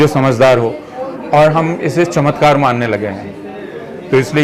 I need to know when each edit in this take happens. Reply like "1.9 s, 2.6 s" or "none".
none